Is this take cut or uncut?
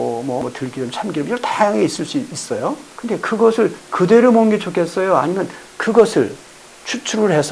uncut